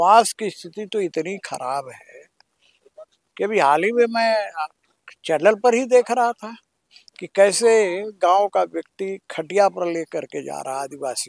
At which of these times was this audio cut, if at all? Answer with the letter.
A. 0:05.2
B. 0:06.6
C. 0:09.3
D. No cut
D